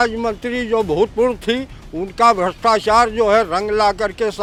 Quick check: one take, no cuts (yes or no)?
yes